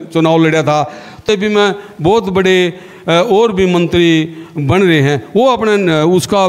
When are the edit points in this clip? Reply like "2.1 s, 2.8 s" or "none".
1.2 s